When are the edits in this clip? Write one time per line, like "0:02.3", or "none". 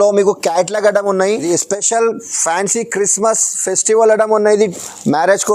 0:01.5